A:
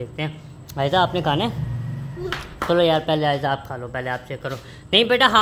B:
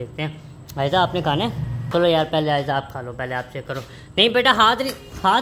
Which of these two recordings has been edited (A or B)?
B